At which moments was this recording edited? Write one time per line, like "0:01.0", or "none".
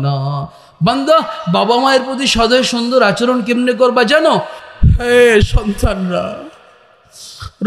0:04.6